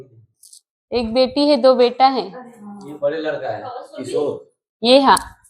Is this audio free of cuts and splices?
yes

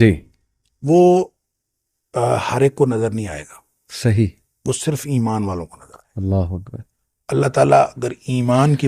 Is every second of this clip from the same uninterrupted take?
yes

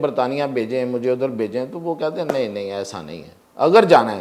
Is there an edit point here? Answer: no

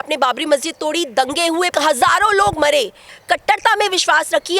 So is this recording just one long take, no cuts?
no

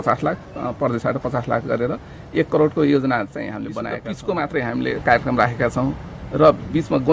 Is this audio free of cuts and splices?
no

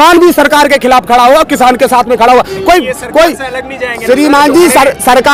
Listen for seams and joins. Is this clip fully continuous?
yes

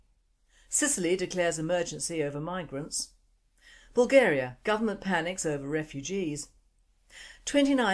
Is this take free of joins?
yes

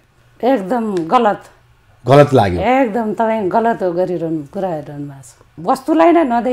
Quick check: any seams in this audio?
yes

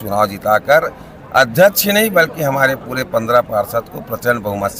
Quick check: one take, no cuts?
yes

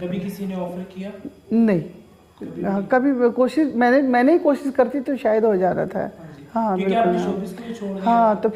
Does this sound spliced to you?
no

